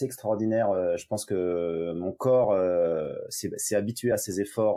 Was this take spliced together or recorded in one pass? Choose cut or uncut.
uncut